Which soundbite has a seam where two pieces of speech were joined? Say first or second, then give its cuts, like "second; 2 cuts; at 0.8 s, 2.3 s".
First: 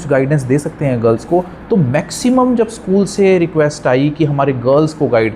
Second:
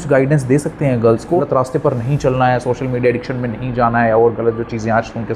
second; 1 cut; at 1.5 s